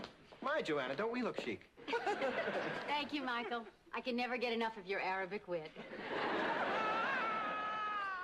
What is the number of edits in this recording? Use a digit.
1